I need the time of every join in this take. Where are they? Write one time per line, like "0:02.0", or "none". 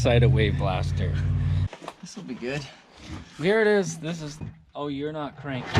0:01.6
0:04.4